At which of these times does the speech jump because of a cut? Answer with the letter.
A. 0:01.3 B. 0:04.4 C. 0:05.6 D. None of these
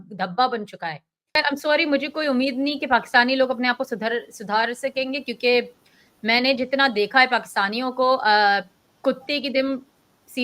A